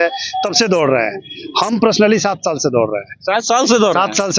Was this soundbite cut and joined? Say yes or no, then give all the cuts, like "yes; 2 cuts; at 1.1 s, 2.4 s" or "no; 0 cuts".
no; 0 cuts